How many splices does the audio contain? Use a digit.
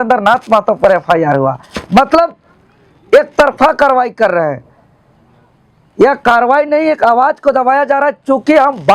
0